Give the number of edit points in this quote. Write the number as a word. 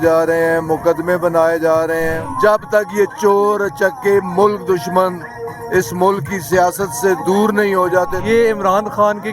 two